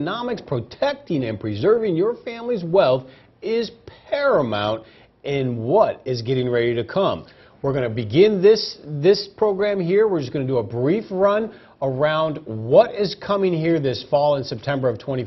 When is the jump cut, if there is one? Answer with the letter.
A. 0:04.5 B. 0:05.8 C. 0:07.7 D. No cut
B